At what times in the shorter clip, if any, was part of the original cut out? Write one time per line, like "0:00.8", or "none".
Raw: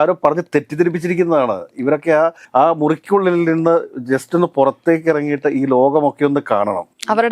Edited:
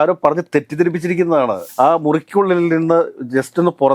0:01.7